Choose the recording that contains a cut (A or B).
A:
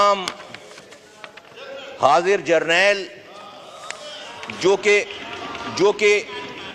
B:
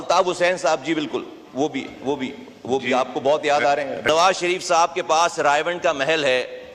B